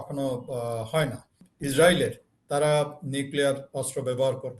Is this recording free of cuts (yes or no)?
no